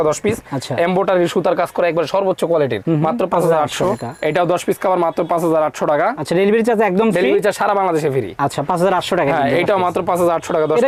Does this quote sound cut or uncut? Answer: uncut